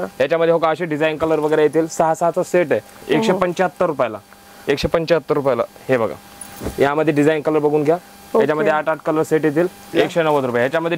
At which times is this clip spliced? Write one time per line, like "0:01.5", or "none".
0:02.9
0:09.9